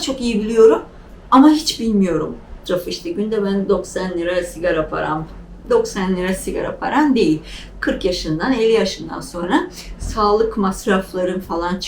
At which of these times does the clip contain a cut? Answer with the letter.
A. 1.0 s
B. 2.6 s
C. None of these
B